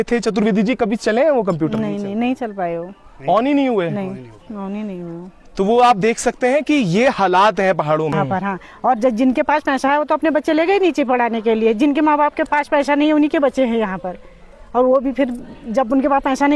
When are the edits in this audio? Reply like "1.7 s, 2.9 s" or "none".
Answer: 8.1 s